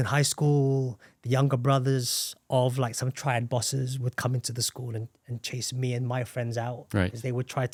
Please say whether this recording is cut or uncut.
uncut